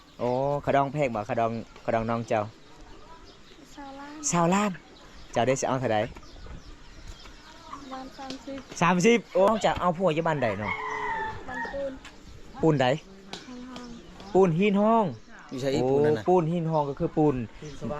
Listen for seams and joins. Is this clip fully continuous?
no; 1 cut; at 9.5 s

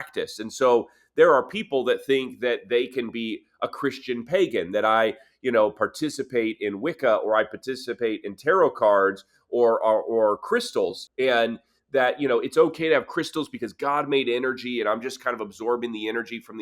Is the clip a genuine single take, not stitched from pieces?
no; 1 cut; at 11.0 s

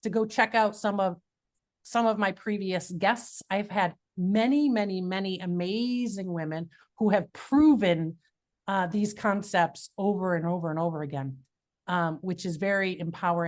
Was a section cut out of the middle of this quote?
no; 0 cuts

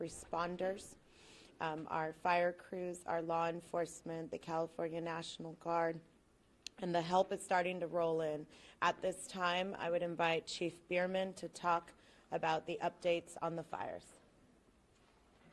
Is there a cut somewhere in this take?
yes; 1 cut; at 10.3 s

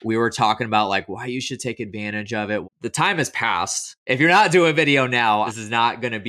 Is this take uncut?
no; 3 cuts; at 2.6 s, 3.9 s, 5.5 s

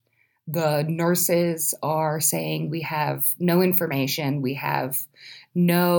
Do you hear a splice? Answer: no; 0 cuts

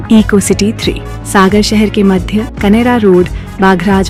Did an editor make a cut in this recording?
no; 0 cuts

